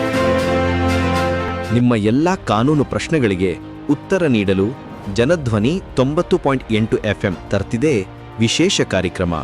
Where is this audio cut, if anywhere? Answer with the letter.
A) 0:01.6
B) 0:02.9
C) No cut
A